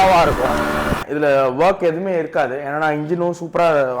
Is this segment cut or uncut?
cut